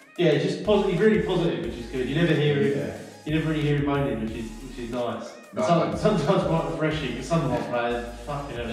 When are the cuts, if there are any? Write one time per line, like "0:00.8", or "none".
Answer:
none